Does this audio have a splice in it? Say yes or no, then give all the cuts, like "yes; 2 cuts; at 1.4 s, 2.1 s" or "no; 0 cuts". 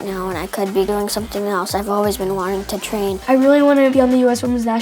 yes; 1 cut; at 3.2 s